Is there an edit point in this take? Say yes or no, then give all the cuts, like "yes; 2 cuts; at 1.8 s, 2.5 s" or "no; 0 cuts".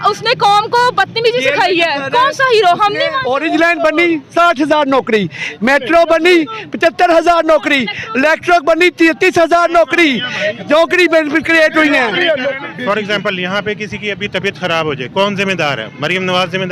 yes; 2 cuts; at 3.2 s, 12.5 s